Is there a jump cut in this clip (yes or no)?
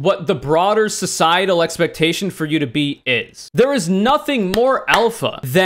yes